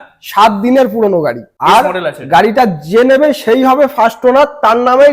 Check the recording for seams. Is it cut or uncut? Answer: cut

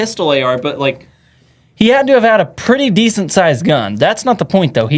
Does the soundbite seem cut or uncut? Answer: uncut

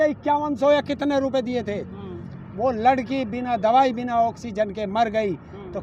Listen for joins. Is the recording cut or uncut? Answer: uncut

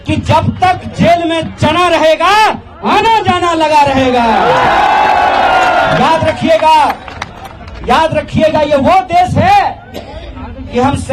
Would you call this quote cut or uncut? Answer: uncut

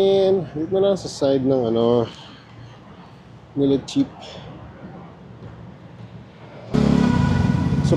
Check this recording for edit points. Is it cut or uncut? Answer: cut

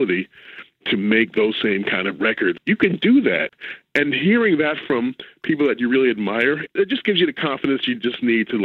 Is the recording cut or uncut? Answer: cut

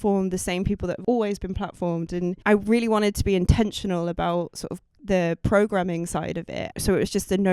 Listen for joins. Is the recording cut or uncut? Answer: cut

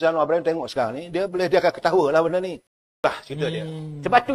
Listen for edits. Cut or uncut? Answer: cut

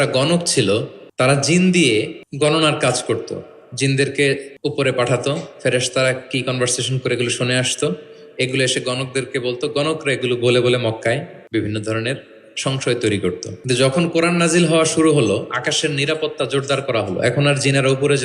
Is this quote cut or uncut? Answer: cut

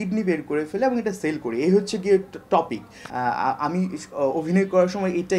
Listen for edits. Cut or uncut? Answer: uncut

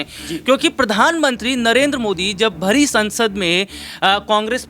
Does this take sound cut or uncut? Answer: uncut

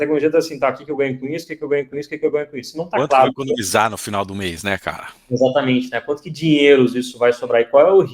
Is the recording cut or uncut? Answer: uncut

